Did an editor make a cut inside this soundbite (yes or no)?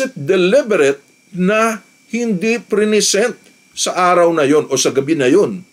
no